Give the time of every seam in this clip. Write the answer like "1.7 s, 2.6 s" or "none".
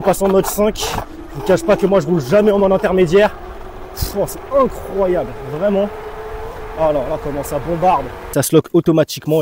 8.3 s